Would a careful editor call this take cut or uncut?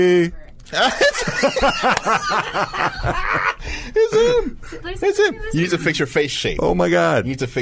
uncut